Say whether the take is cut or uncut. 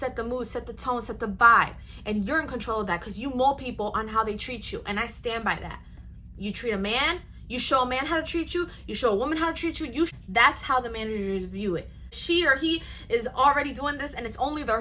cut